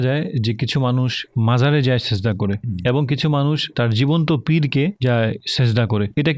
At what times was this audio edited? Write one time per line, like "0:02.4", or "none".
none